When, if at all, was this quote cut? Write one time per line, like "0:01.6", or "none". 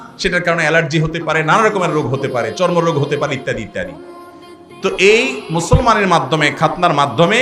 none